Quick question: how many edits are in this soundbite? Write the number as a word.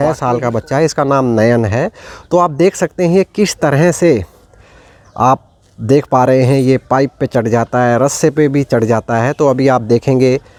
zero